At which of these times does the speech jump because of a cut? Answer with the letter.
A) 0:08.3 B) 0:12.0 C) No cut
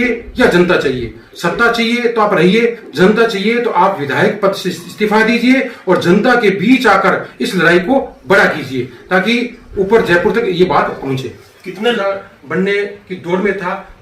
B